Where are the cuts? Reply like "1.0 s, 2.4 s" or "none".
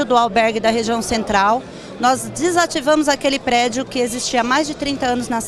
none